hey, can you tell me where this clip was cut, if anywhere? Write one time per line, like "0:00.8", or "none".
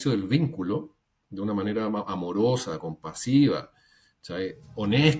none